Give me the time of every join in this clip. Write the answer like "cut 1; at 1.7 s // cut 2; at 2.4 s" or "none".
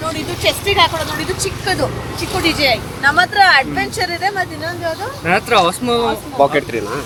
none